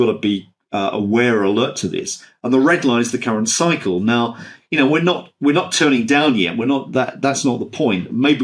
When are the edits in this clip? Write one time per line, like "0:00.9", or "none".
none